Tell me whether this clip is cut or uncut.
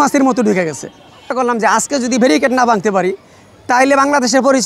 cut